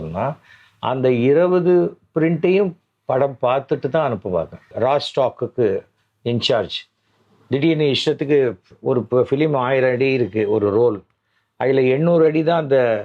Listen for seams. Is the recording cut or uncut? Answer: cut